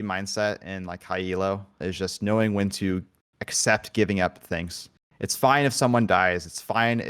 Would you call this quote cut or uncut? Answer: cut